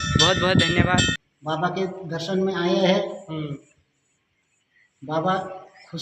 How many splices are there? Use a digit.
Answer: 1